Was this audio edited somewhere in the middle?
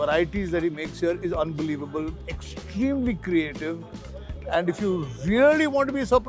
no; 0 cuts

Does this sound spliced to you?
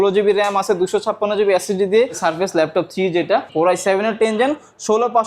yes; 2 cuts; at 2.2 s, 3.5 s

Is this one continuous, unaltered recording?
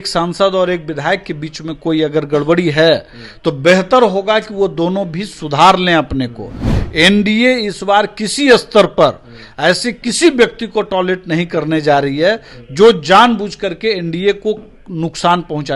yes; 0 cuts

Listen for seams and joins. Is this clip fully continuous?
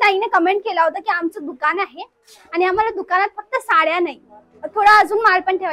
yes; 0 cuts

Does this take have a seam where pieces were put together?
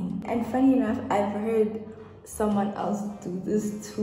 no; 0 cuts

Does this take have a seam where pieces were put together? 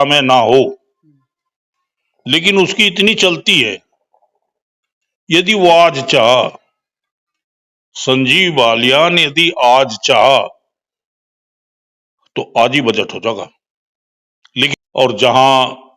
yes; 1 cut; at 14.7 s

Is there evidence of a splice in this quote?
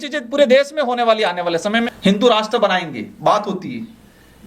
yes; 1 cut; at 1.7 s

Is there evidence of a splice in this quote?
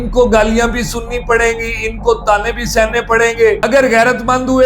yes; 1 cut; at 3.6 s

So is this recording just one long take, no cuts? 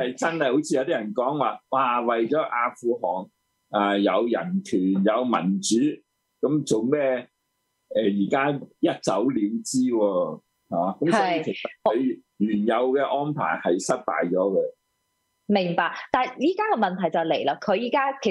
yes; 0 cuts

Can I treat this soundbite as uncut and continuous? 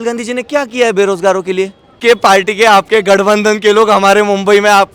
no; 1 cut; at 2.0 s

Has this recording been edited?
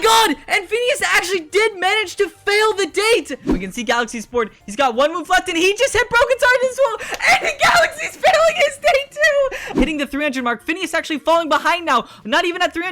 yes; 2 cuts; at 3.4 s, 9.6 s

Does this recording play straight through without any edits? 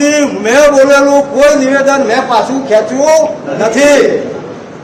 yes; 0 cuts

